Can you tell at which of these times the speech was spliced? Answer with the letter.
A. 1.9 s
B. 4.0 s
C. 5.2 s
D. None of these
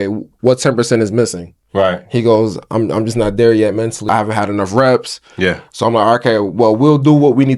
B